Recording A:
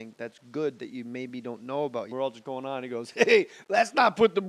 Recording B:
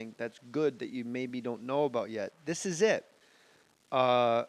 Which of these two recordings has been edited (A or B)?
B